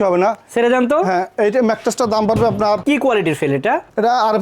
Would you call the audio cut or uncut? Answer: cut